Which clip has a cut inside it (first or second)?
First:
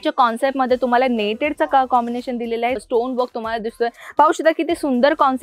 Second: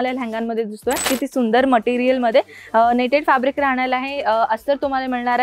second